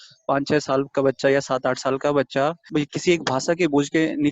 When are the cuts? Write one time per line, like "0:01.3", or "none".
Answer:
0:02.7